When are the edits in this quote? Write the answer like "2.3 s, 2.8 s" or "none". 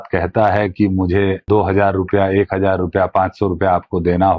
1.4 s